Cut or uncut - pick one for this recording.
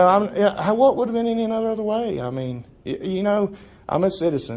uncut